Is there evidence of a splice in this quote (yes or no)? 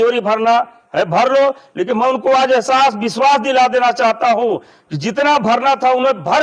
no